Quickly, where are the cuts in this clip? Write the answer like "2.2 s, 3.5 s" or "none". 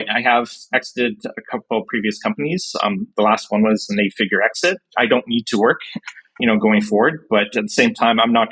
none